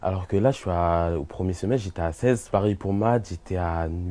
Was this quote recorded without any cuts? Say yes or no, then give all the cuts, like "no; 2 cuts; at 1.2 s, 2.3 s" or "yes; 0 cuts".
no; 1 cut; at 2.2 s